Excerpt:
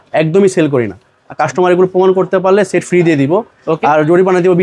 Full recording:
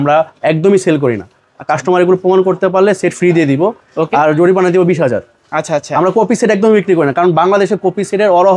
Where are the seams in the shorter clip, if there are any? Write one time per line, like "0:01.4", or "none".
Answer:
none